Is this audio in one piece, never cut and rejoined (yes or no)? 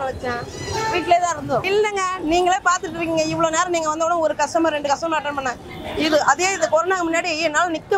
no